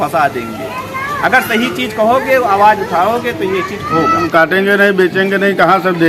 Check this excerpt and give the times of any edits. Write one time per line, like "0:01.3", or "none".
0:04.3